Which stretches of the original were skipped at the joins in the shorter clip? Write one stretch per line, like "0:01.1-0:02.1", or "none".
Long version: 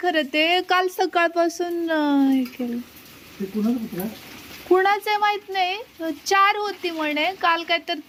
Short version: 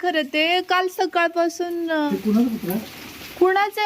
0:02.1-0:03.4